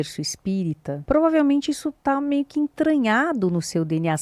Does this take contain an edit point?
yes; 1 cut; at 0.9 s

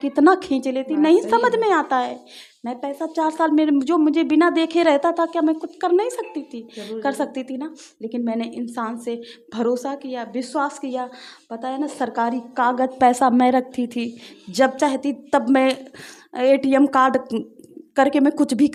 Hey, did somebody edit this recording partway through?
no; 0 cuts

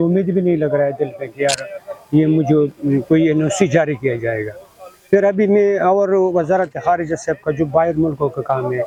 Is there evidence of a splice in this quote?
no; 0 cuts

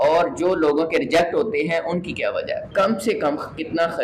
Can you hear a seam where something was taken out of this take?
yes; 1 cut; at 2.7 s

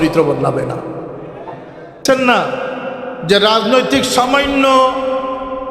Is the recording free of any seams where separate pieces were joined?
no; 1 cut; at 2.0 s

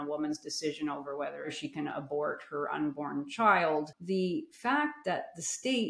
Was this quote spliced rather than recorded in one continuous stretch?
yes; 2 cuts; at 1.5 s, 4.0 s

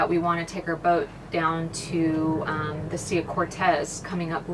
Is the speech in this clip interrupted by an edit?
no; 0 cuts

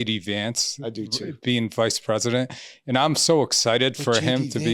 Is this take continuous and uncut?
yes; 0 cuts

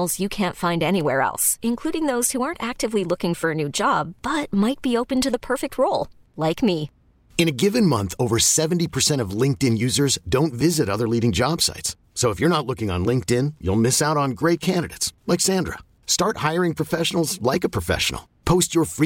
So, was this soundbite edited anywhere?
no; 0 cuts

